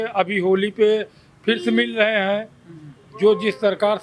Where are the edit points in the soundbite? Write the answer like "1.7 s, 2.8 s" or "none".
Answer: none